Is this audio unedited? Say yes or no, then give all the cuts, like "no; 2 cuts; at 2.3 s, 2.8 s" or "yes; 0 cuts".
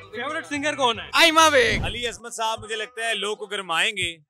no; 2 cuts; at 1.0 s, 1.9 s